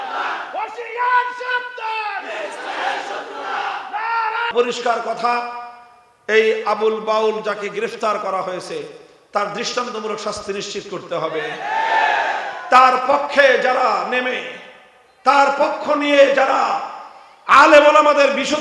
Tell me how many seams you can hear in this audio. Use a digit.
1